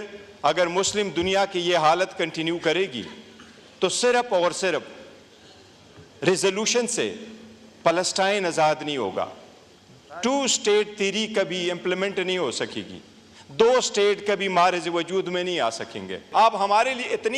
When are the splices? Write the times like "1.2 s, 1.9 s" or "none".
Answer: 16.2 s